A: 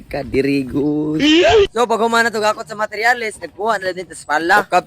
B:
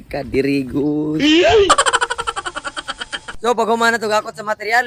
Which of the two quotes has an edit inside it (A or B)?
A